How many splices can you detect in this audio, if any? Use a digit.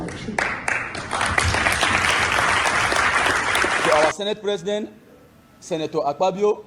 1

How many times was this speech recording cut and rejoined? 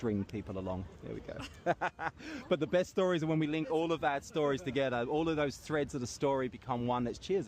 1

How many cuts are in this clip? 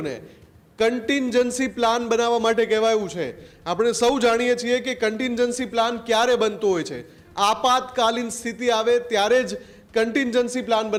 0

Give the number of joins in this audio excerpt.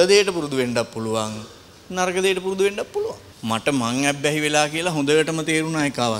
1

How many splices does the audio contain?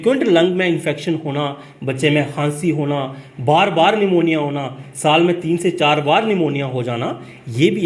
0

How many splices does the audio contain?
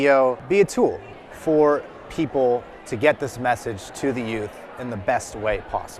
1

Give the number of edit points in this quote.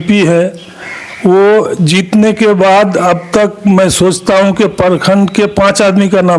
0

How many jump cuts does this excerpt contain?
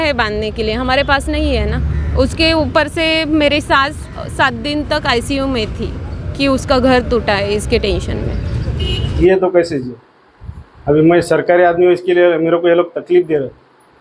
1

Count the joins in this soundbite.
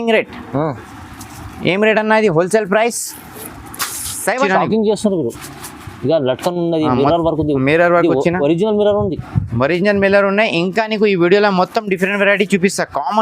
1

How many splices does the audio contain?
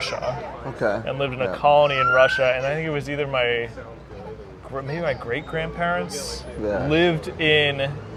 0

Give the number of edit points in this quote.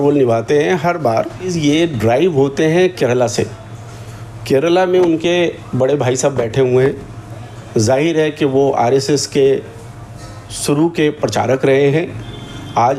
1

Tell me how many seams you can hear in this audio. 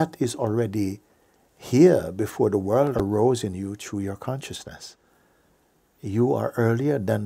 1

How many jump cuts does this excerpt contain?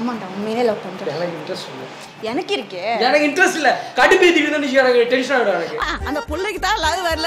0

